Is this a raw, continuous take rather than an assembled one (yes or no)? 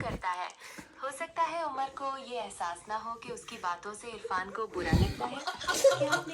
yes